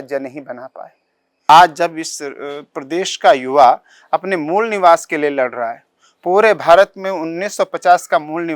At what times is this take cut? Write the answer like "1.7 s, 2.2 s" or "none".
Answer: 1.5 s